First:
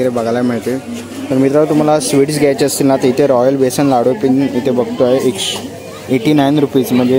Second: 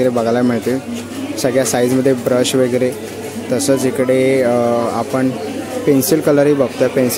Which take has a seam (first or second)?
first